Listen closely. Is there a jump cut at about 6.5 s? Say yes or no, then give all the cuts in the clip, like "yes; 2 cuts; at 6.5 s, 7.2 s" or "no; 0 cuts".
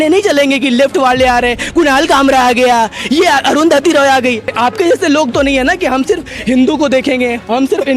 no; 1 cut; at 4.5 s